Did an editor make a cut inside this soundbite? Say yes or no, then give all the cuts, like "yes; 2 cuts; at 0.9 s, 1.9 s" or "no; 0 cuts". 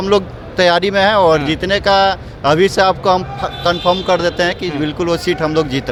no; 0 cuts